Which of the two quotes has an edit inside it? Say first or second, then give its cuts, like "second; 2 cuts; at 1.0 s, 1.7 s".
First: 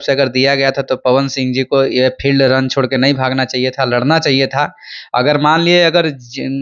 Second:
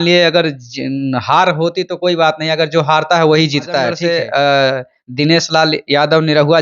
second; 1 cut; at 4.0 s